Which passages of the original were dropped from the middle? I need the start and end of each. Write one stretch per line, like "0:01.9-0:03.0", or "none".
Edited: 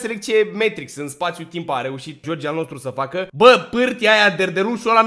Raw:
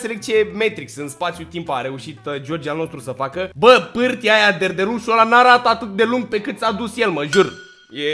0:02.2-0:02.4